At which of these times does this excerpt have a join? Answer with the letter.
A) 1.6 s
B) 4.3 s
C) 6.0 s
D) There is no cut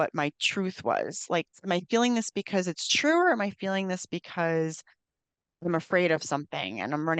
A